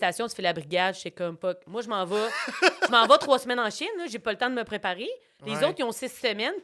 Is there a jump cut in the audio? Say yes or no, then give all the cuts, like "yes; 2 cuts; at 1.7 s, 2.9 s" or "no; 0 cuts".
yes; 1 cut; at 1.4 s